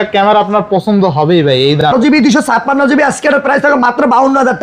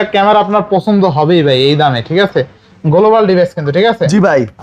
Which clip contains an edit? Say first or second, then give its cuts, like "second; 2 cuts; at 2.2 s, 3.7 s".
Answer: first; 1 cut; at 1.9 s